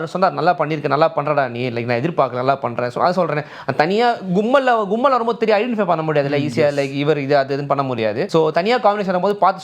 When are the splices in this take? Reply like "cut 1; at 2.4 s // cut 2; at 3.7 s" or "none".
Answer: cut 1; at 8.2 s